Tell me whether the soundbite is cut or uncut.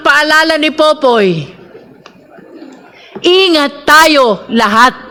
uncut